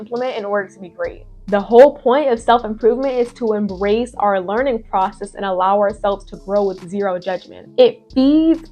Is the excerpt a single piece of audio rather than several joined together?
no; 2 cuts; at 1.3 s, 7.5 s

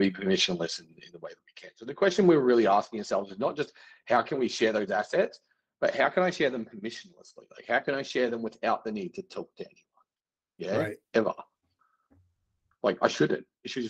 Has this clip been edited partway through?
no; 0 cuts

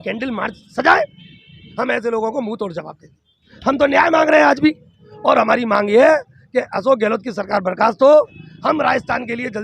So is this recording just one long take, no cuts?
no; 4 cuts; at 1.6 s, 3.5 s, 5.0 s, 8.4 s

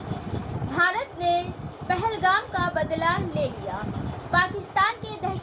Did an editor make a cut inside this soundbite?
no; 0 cuts

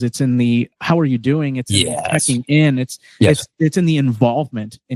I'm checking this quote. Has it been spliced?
no; 0 cuts

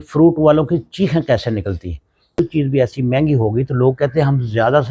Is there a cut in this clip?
yes; 1 cut; at 2.4 s

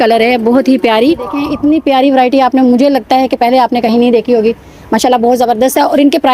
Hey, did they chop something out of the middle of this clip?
yes; 1 cut; at 1.5 s

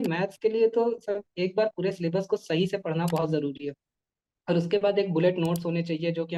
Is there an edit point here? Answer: no; 0 cuts

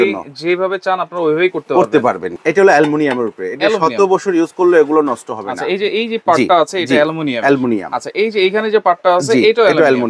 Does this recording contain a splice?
yes; 1 cut; at 2.3 s

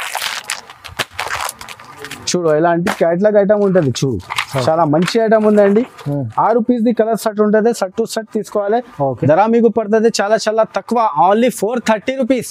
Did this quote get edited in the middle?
no; 0 cuts

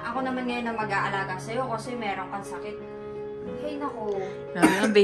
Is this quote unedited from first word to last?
yes; 0 cuts

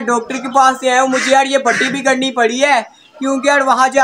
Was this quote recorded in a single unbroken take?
yes; 0 cuts

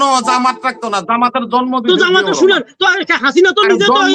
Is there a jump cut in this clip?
no; 0 cuts

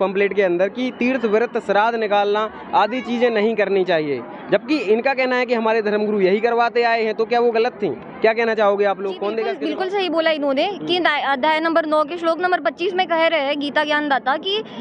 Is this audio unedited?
no; 1 cut; at 9.6 s

